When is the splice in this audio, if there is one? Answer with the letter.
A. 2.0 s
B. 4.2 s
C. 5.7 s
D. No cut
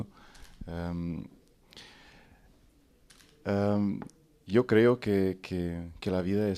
D